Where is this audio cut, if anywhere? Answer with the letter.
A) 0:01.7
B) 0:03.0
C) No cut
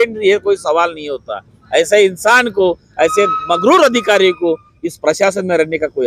C